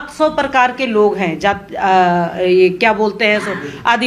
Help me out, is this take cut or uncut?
uncut